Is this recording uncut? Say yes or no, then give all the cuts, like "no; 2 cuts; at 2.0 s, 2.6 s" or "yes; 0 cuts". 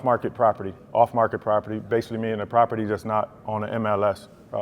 yes; 0 cuts